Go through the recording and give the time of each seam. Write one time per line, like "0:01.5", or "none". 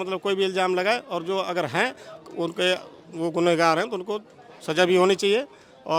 none

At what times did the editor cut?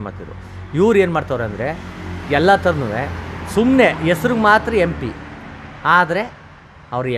none

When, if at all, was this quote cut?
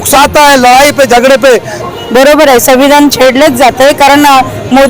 0:01.8

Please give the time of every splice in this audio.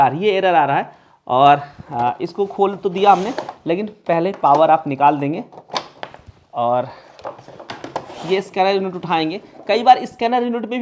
none

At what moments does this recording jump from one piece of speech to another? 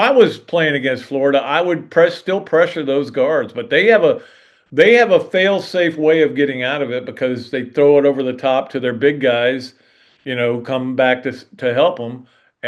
none

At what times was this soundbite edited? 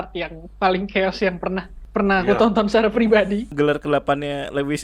0:01.7
0:03.5

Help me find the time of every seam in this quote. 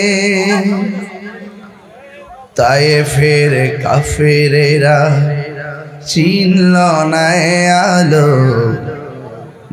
none

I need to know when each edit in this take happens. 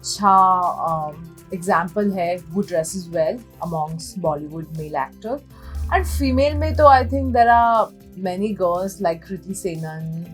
none

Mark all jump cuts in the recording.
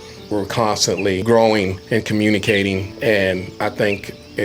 0:01.2
0:01.8
0:02.9

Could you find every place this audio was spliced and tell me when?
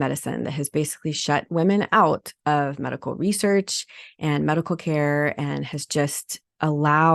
none

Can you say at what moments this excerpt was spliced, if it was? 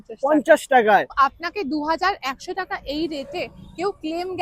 0:01.1

